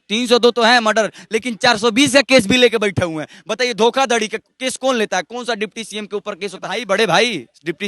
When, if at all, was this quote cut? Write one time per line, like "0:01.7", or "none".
0:06.8